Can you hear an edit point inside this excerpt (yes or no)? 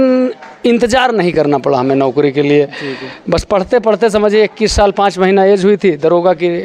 no